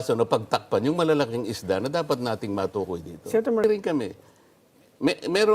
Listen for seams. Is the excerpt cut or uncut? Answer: cut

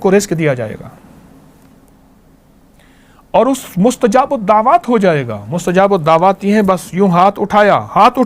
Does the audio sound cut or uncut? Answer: uncut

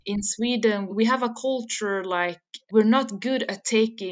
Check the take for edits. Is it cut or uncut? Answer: cut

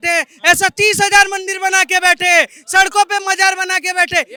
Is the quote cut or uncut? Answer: uncut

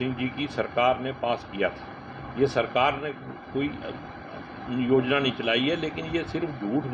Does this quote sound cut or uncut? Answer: uncut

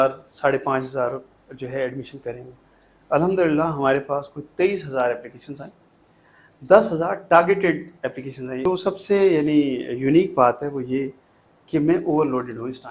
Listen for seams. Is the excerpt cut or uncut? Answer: cut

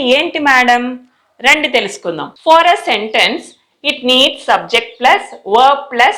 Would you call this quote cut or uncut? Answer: cut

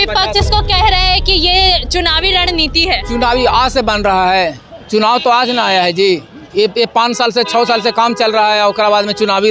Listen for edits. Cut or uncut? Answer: uncut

